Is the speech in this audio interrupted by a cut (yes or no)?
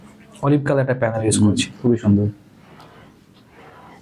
no